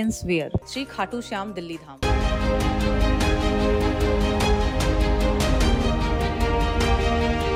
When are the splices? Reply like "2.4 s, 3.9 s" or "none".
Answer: none